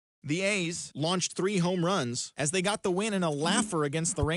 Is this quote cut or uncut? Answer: cut